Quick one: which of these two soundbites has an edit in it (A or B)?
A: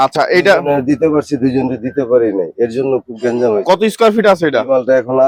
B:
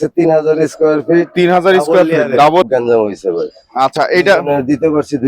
B